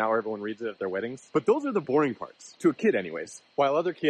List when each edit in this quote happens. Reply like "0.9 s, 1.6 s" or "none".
1.5 s